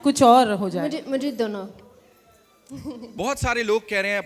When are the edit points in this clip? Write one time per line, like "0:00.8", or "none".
0:03.0